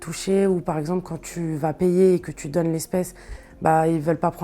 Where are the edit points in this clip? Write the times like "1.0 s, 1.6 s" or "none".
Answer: none

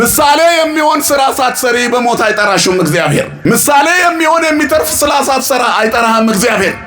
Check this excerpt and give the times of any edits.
3.3 s

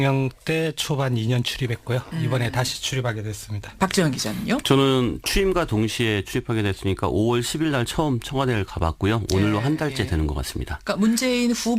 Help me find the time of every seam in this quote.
8.9 s

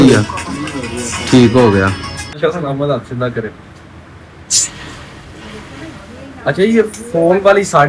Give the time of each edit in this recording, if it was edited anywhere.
2.4 s

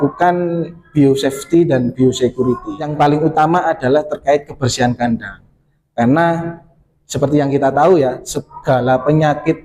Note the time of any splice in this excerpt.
2.7 s

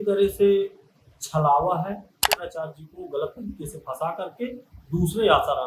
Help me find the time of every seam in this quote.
2.3 s

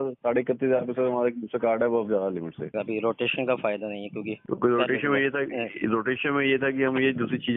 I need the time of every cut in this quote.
2.7 s, 4.4 s

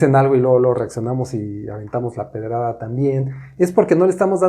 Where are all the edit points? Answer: none

